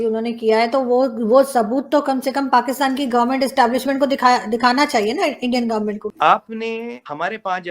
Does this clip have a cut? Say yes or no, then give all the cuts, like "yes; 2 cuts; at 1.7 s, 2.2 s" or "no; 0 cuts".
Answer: yes; 1 cut; at 6.1 s